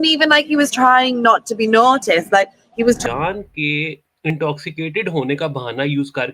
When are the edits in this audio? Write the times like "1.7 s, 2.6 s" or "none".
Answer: 3.0 s